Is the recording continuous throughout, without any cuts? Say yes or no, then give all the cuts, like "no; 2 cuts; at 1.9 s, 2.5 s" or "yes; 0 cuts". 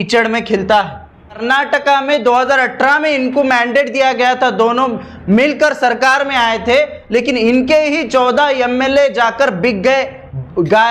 no; 1 cut; at 1.4 s